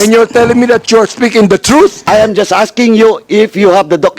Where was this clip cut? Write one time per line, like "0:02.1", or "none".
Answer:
0:02.0